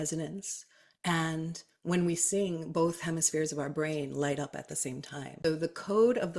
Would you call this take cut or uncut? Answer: cut